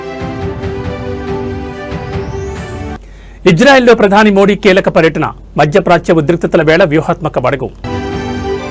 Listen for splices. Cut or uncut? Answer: cut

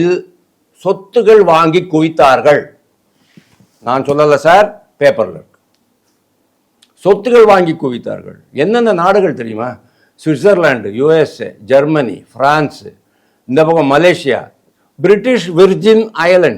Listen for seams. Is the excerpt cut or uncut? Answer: uncut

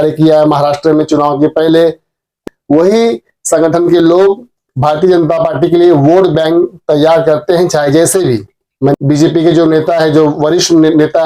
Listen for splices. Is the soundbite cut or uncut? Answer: cut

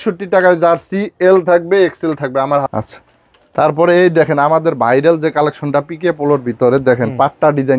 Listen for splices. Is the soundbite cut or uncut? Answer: cut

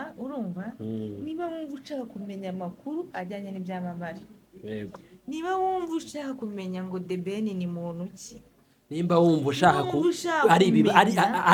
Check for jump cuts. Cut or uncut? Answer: uncut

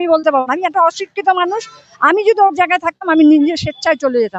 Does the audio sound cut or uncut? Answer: uncut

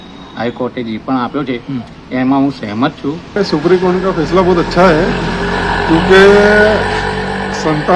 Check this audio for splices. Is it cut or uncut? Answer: cut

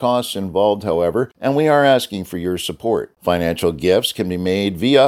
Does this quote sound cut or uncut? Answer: cut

